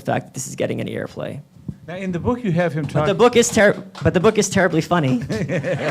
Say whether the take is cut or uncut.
cut